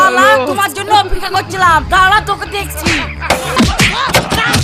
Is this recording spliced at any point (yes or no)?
yes